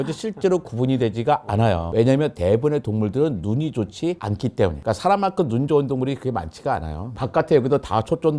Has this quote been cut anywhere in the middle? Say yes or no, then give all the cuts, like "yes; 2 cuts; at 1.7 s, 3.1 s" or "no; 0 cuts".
no; 0 cuts